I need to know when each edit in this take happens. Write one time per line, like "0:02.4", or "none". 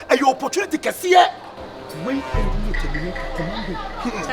none